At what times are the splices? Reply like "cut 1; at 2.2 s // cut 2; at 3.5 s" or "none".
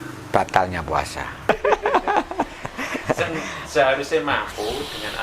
cut 1; at 1.5 s